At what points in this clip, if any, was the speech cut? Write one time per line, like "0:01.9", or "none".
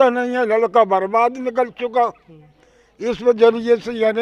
none